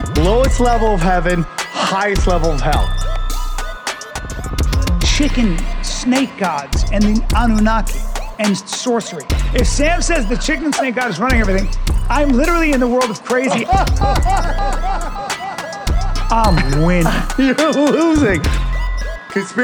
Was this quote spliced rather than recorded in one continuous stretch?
no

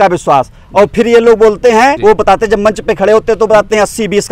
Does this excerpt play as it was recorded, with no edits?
no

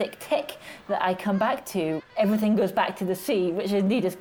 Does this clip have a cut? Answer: yes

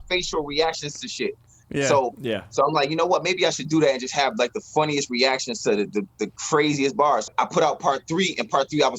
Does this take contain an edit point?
yes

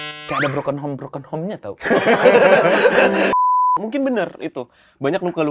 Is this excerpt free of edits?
no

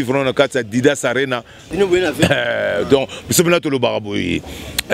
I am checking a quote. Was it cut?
yes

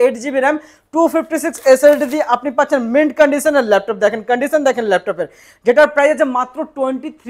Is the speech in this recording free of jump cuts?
yes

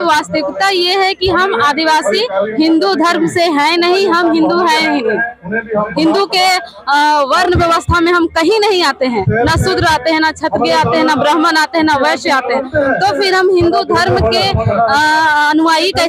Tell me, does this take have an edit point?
no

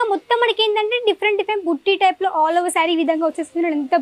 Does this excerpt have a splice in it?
no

